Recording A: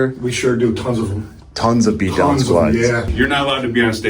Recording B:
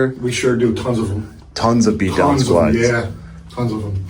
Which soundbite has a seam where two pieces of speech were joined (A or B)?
A